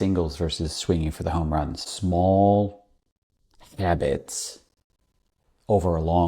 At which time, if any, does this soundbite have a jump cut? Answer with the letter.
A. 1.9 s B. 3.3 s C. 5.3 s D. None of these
A